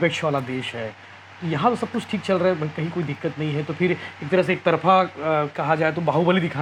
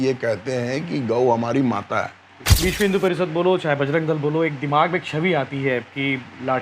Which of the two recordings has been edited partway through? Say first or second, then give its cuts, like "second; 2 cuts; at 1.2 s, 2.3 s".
second; 1 cut; at 2.5 s